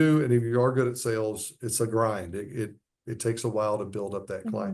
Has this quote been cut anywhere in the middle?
no; 0 cuts

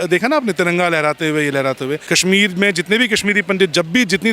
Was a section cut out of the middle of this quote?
yes; 1 cut; at 2.0 s

